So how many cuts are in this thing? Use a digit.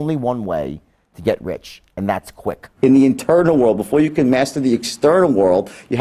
1